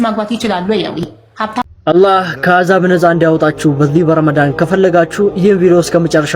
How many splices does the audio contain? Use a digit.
1